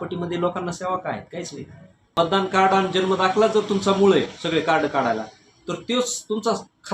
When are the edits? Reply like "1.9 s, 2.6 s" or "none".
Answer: 2.1 s